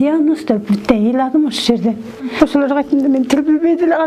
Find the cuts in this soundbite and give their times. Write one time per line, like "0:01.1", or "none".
0:02.3